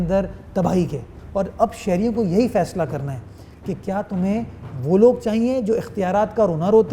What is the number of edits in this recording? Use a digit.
1